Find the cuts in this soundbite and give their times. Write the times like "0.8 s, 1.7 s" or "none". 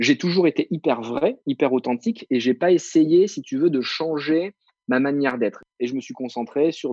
5.6 s